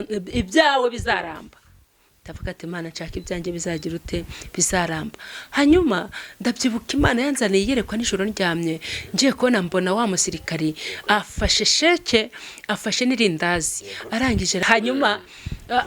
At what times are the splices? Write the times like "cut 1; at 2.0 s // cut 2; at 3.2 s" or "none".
cut 1; at 14.6 s